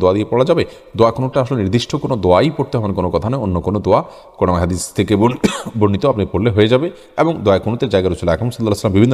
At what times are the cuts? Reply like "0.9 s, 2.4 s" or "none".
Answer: none